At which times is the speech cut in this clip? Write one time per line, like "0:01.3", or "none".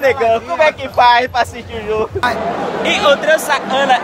0:02.7